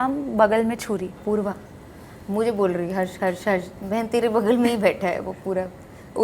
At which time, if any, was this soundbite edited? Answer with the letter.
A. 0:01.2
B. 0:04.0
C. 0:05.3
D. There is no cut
A